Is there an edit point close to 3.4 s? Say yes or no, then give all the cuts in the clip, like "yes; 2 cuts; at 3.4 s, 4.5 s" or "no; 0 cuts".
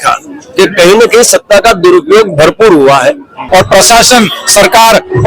yes; 1 cut; at 3.4 s